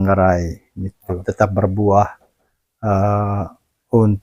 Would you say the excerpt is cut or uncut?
cut